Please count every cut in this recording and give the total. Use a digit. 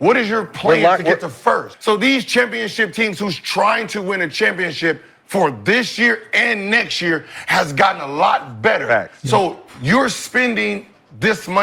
1